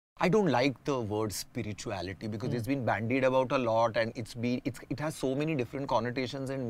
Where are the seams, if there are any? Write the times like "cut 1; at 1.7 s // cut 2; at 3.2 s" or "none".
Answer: none